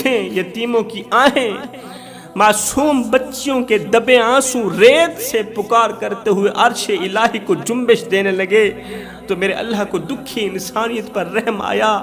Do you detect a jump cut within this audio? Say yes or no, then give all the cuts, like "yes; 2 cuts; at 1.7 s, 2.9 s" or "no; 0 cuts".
no; 0 cuts